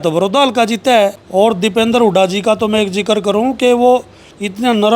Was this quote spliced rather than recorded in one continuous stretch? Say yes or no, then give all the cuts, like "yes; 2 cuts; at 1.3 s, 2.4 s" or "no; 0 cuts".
yes; 1 cut; at 1.4 s